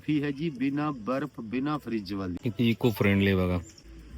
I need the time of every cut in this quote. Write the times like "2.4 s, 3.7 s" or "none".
2.4 s